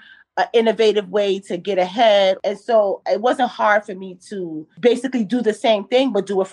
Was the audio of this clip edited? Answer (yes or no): yes